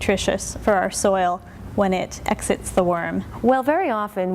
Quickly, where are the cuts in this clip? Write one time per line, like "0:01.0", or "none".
0:03.2